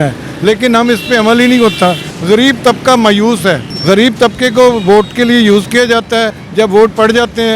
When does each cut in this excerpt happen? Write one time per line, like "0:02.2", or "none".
0:02.1
0:03.7
0:06.4